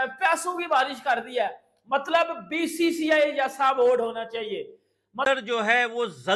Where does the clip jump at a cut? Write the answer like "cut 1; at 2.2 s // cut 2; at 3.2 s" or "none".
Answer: cut 1; at 5.2 s

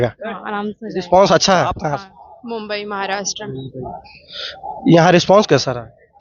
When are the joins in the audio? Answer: cut 1; at 1.8 s

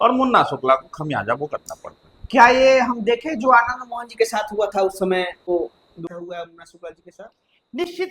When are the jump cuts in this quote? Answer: none

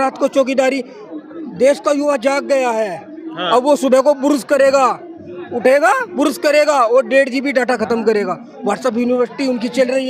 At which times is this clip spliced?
none

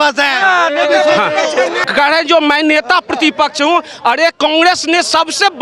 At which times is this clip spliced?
cut 1; at 1.8 s

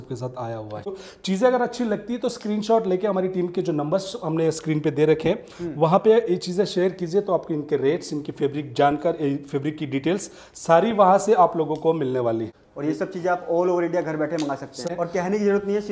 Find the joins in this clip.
cut 1; at 0.9 s // cut 2; at 12.5 s // cut 3; at 14.8 s

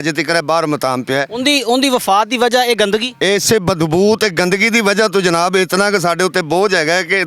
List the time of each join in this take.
none

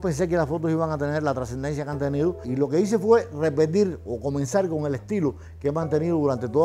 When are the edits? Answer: cut 1; at 2.5 s

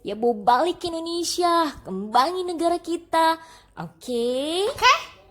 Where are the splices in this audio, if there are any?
none

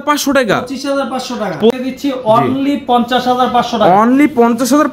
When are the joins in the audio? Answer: cut 1; at 1.7 s

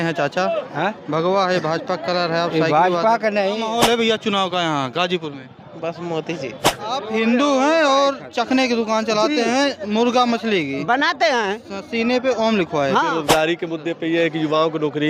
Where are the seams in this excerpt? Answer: cut 1; at 3.6 s // cut 2; at 7.0 s // cut 3; at 13.1 s

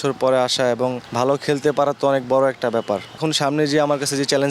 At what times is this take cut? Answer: cut 1; at 1.0 s // cut 2; at 3.2 s

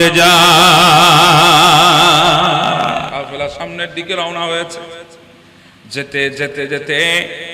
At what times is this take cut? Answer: cut 1; at 3.1 s

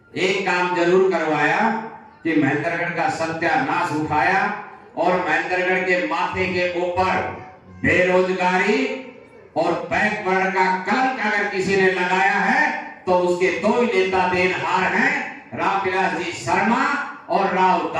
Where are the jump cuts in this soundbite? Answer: none

